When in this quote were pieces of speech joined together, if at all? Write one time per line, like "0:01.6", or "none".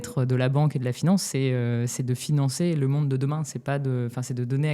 none